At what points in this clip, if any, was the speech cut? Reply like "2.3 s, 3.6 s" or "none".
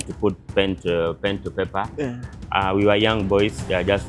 none

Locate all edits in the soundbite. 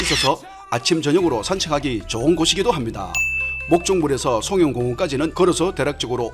5.3 s

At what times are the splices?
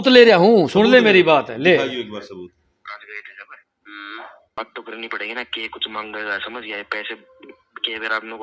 4.6 s

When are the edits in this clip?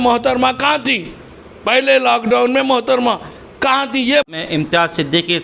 4.3 s

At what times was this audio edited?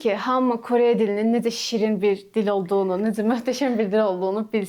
none

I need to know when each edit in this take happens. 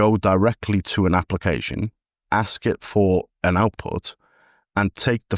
none

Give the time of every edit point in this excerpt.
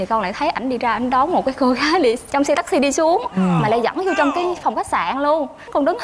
none

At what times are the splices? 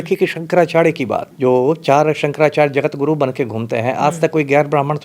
1.3 s

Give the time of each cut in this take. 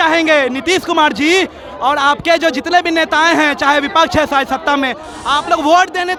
none

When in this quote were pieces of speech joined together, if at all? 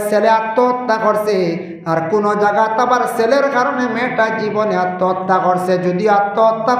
none

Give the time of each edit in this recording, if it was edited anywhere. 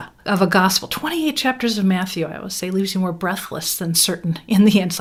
none

